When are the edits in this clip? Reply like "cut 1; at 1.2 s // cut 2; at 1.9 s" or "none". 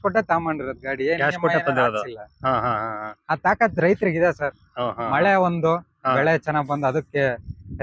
none